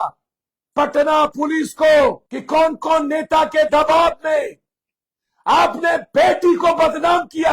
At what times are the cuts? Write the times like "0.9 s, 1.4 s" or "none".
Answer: 2.3 s